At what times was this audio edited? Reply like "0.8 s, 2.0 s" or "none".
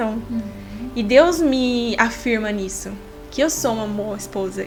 none